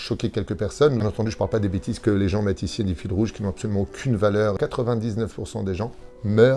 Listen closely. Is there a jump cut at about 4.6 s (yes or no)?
yes